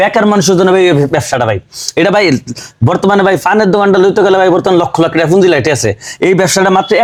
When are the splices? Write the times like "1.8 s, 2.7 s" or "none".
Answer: none